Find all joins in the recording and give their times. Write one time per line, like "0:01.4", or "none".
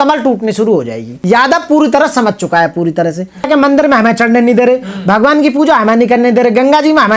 0:01.2
0:03.5